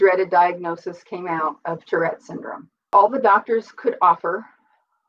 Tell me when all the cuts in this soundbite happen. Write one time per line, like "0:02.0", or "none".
0:02.9